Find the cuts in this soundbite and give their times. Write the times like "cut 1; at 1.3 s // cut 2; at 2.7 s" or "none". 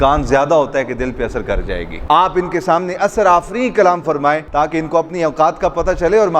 cut 1; at 2.0 s // cut 2; at 4.5 s